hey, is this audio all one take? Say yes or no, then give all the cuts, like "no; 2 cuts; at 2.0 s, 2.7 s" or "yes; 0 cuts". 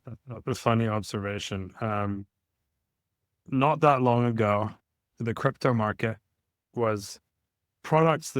yes; 0 cuts